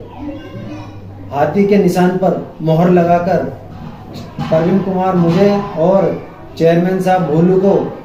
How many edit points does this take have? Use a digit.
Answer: 0